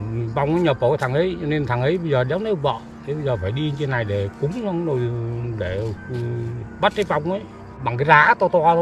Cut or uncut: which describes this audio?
cut